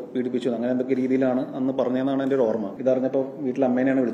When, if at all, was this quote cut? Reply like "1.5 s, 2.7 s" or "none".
2.7 s